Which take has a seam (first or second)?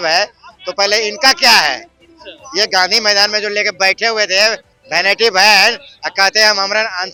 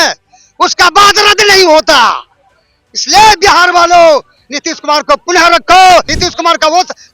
second